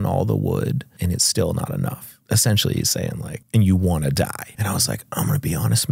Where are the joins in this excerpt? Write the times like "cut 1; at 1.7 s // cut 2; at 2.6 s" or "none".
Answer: cut 1; at 0.9 s // cut 2; at 2.1 s // cut 3; at 3.3 s // cut 4; at 4.5 s